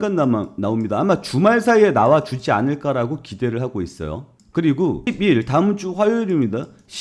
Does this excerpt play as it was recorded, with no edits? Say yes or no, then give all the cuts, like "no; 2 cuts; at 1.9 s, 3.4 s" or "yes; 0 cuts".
yes; 0 cuts